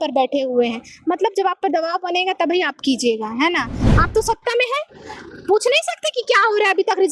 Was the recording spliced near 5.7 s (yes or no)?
no